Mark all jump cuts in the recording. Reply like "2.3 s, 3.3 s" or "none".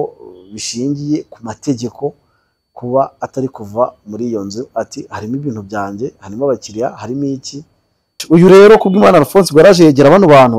8.1 s